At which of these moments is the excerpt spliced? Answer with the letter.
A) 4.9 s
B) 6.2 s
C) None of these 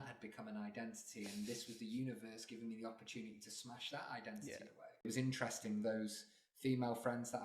A